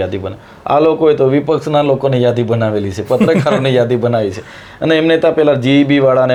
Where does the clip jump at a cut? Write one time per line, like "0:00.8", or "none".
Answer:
none